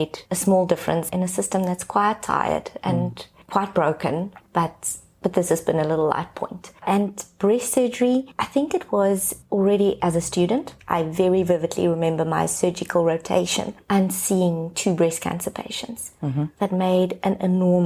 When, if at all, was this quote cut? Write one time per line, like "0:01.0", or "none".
0:01.1
0:08.4
0:09.3